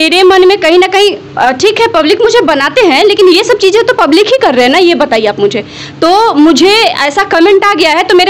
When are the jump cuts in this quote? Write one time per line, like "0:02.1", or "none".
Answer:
none